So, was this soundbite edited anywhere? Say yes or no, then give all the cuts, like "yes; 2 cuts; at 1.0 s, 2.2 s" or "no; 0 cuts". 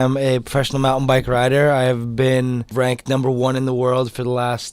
yes; 1 cut; at 2.7 s